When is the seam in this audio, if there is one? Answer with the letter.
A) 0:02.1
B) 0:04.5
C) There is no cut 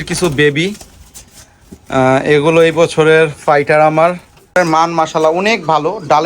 B